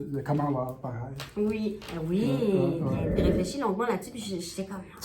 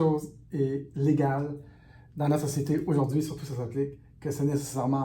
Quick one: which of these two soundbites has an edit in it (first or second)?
first